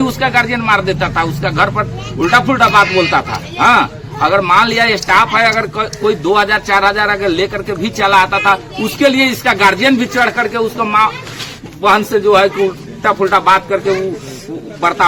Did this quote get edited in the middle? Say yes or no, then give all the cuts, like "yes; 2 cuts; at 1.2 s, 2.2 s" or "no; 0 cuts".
no; 0 cuts